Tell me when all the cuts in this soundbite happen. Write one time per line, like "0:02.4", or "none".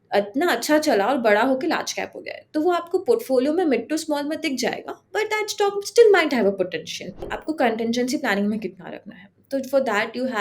0:07.4